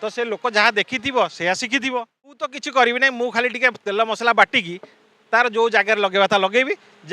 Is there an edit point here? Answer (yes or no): yes